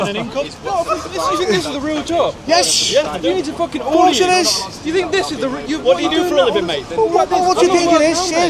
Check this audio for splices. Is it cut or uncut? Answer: uncut